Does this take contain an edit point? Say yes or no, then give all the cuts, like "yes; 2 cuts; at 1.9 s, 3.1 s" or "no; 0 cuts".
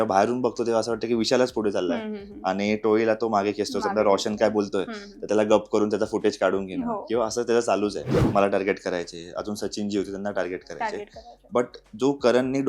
yes; 1 cut; at 8.2 s